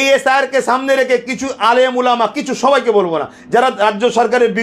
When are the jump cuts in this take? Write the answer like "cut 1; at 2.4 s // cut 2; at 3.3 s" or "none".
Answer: none